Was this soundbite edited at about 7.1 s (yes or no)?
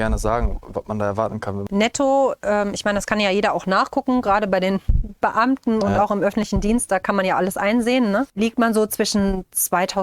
no